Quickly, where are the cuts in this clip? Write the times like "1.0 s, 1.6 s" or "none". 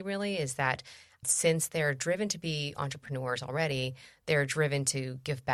none